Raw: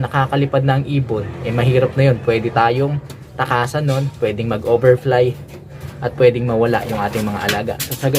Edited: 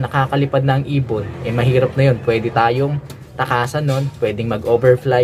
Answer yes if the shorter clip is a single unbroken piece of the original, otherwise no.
yes